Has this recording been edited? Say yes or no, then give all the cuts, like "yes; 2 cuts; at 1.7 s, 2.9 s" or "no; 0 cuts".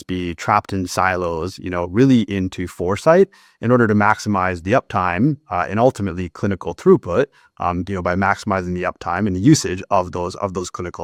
no; 0 cuts